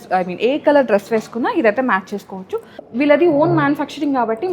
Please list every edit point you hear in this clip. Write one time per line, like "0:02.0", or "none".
0:02.8